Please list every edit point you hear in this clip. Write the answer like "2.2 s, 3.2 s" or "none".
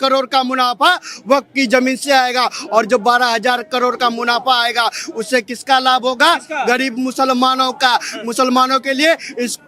none